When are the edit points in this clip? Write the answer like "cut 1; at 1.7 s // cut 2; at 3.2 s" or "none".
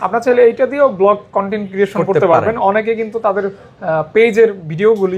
none